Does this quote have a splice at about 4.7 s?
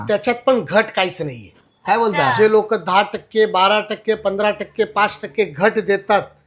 no; 0 cuts

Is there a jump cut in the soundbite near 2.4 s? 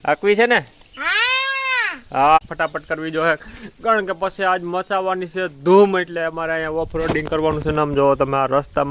yes; 1 cut; at 2.4 s

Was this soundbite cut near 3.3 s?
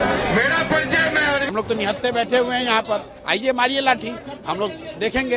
no; 1 cut; at 1.5 s

